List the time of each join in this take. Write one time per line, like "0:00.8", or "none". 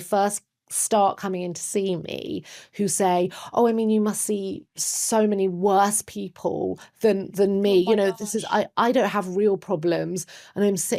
none